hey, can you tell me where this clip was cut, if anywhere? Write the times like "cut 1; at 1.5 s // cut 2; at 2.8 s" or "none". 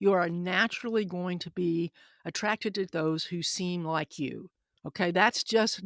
cut 1; at 4.6 s